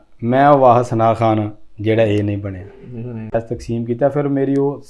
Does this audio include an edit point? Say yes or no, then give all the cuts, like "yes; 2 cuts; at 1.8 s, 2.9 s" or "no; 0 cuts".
yes; 1 cut; at 3.3 s